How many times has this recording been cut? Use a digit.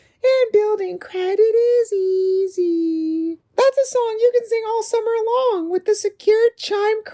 1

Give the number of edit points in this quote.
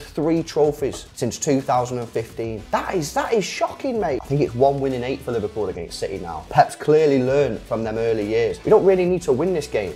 5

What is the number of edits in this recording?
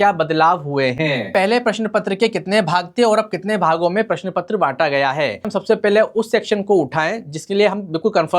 2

